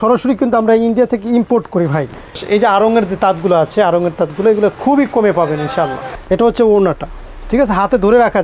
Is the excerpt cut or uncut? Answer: cut